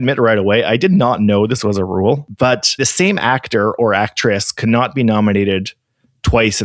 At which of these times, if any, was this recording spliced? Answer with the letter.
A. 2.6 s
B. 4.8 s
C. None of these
A